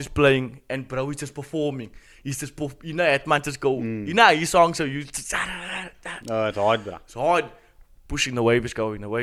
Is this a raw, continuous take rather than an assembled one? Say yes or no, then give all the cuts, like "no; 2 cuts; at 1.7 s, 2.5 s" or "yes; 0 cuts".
yes; 0 cuts